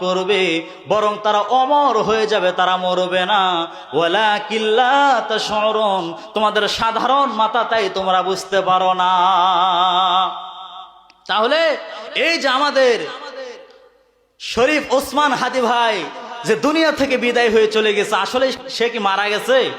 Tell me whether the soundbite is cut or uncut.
cut